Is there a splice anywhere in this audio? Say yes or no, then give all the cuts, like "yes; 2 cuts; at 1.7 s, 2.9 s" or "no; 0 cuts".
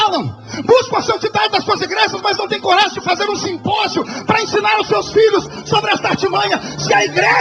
no; 0 cuts